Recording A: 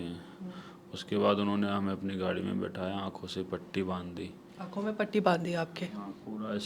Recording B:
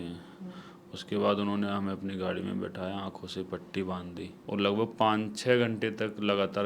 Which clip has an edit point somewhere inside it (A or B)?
B